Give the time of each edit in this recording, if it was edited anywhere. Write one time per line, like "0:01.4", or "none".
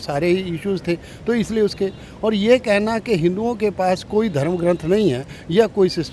none